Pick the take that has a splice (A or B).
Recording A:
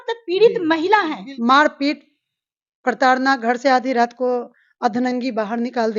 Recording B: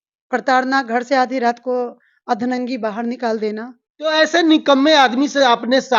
A